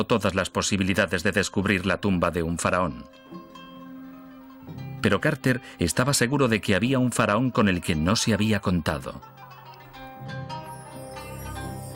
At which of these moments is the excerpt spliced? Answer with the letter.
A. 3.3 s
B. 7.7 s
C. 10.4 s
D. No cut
C